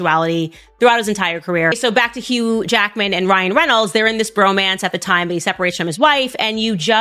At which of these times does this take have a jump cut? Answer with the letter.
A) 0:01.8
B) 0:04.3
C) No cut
A